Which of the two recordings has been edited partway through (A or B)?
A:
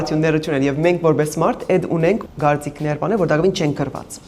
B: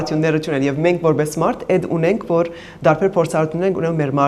A